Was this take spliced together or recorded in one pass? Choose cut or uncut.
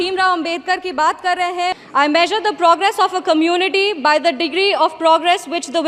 cut